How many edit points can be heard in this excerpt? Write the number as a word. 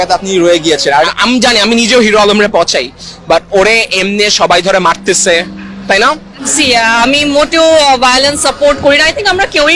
two